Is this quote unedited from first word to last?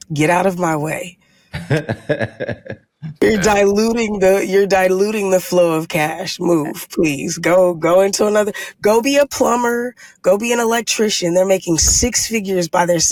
yes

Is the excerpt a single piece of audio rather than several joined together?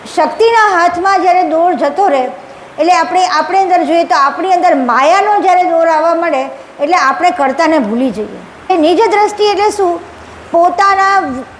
no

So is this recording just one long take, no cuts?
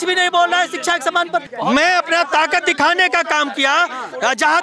no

